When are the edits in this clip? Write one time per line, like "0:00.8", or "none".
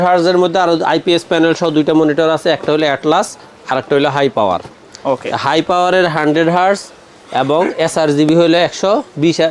none